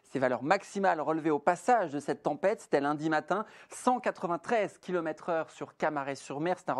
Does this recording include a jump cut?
yes; 1 cut; at 1.1 s

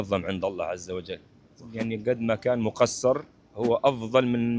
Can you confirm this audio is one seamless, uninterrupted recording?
yes; 0 cuts

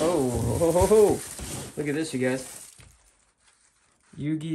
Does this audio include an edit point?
no; 0 cuts

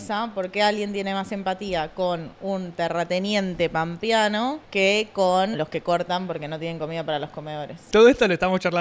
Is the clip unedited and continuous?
no; 3 cuts; at 4.6 s, 5.6 s, 7.9 s

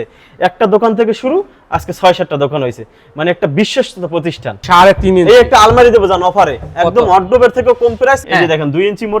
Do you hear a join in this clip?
yes; 2 cuts; at 4.5 s, 8.2 s

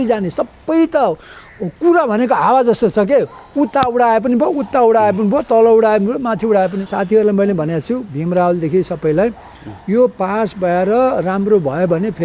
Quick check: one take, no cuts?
no; 1 cut; at 6.9 s

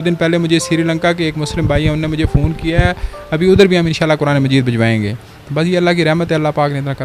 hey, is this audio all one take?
yes; 0 cuts

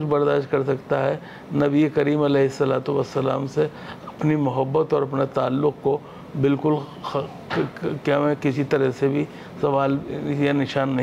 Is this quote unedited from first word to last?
yes; 0 cuts

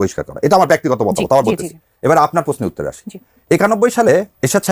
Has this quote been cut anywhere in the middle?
no; 0 cuts

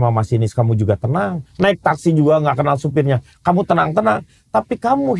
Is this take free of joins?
yes; 0 cuts

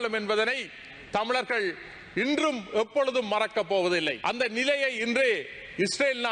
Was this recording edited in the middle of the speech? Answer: yes; 1 cut; at 4.2 s

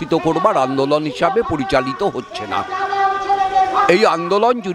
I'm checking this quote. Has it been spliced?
no; 0 cuts

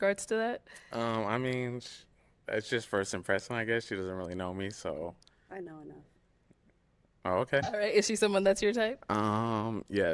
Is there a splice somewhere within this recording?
yes; 1 cut; at 7.6 s

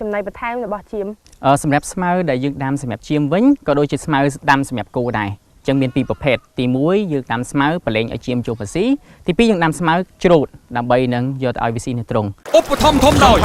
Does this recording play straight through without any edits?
no; 1 cut; at 12.4 s

